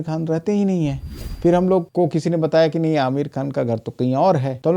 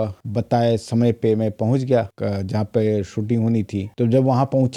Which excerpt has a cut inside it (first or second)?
first